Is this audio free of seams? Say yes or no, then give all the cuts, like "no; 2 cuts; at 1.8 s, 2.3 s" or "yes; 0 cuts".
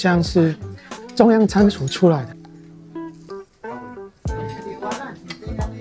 yes; 0 cuts